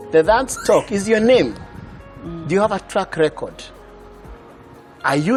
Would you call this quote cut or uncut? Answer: uncut